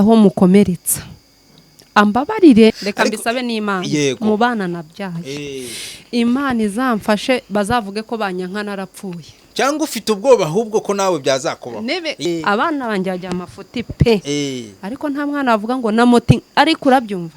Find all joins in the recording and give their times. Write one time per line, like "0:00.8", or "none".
0:02.8
0:12.2